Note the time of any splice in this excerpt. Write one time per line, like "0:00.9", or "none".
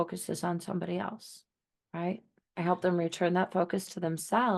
0:02.4